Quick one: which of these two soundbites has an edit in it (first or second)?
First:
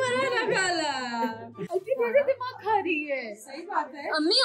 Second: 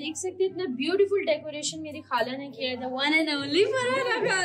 first